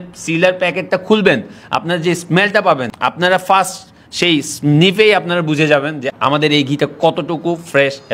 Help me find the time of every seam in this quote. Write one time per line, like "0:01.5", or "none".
none